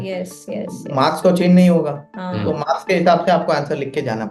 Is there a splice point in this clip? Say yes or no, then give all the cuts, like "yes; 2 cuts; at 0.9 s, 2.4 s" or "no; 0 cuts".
no; 0 cuts